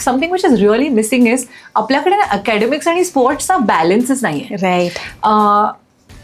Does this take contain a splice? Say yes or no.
no